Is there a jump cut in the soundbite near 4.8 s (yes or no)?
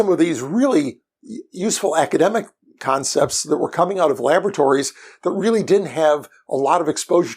no